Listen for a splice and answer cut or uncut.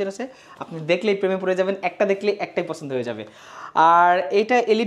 uncut